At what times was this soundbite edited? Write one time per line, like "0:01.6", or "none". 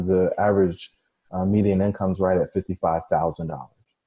none